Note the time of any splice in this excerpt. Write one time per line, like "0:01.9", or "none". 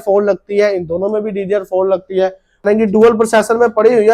0:02.6